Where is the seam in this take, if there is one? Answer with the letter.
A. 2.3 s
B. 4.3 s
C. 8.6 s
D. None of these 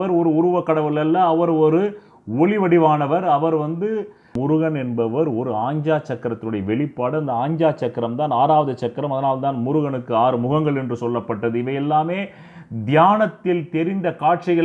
B